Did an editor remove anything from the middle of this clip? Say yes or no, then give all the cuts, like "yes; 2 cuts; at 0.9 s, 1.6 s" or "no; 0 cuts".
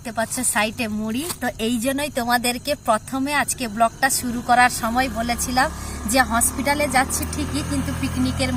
no; 0 cuts